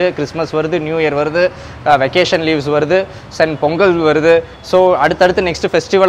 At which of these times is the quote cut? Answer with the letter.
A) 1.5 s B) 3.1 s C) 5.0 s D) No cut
D